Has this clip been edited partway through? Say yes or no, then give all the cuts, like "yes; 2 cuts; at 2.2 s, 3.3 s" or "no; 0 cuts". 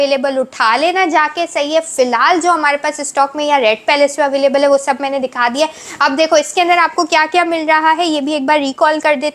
no; 0 cuts